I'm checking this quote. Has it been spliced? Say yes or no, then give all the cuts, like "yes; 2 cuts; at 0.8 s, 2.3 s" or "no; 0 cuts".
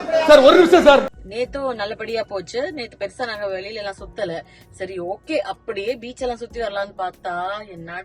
yes; 1 cut; at 1.1 s